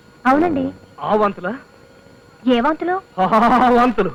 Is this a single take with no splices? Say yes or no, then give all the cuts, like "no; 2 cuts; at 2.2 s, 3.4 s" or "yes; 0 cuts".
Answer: yes; 0 cuts